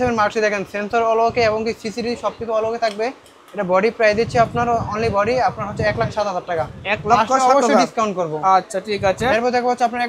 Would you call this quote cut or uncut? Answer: uncut